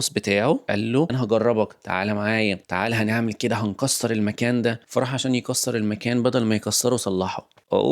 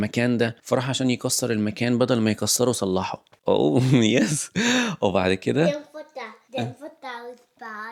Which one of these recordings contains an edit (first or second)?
first